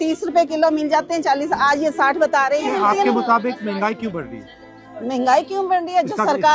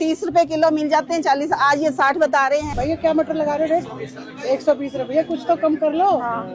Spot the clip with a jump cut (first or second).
second